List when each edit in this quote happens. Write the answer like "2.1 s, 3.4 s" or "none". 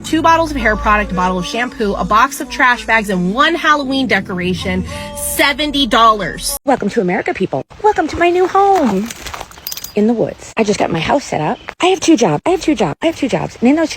6.4 s